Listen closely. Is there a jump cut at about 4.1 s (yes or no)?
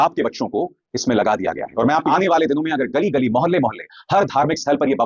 no